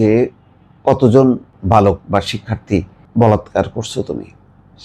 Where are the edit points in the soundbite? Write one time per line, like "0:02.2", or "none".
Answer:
0:01.5
0:03.0